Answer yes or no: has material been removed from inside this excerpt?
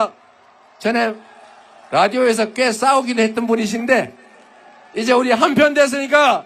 no